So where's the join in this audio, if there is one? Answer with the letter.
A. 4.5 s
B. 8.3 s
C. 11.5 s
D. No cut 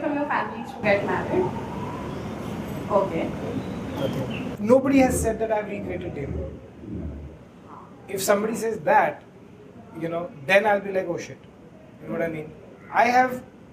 A